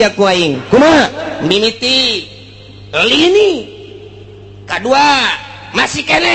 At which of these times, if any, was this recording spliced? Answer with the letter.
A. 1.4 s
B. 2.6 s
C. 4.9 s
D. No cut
A